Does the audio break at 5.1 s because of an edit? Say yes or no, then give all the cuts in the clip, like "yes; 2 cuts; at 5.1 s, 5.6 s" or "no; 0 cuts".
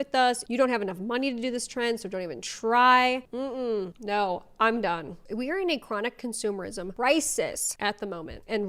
yes; 3 cuts; at 5.1 s, 6.9 s, 7.7 s